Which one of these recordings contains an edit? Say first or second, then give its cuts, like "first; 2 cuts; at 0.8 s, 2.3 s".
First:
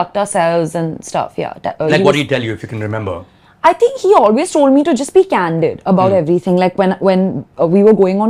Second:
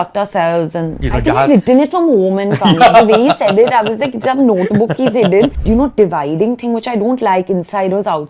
second; 2 cuts; at 1.0 s, 5.6 s